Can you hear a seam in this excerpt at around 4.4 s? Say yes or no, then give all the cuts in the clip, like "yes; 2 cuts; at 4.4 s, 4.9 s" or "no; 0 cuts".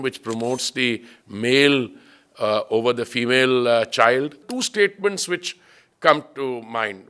yes; 1 cut; at 4.4 s